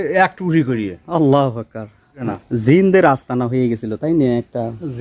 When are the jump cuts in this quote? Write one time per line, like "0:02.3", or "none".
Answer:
0:02.2